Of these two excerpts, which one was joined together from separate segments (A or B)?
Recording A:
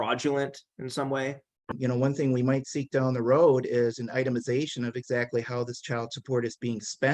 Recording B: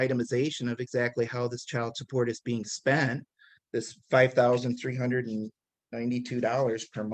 A